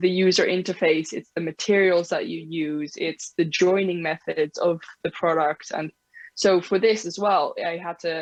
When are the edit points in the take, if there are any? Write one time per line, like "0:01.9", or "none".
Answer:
none